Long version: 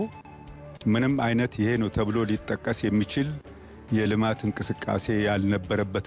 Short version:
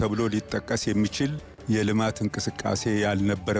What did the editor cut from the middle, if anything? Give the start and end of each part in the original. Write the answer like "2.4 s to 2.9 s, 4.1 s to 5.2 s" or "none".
3.4 s to 3.7 s